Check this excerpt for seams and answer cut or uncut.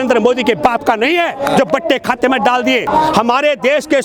cut